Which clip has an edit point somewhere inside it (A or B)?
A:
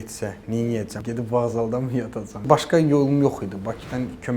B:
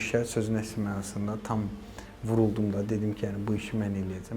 A